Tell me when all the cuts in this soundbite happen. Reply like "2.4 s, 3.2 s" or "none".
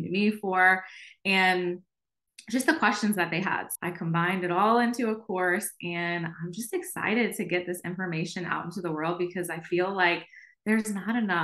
3.7 s